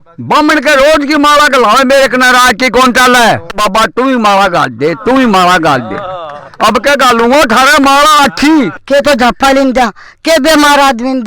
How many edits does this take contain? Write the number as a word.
one